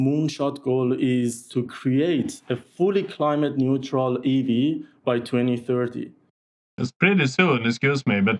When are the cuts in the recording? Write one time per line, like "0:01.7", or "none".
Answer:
none